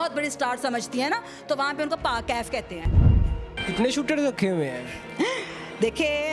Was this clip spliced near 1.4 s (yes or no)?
no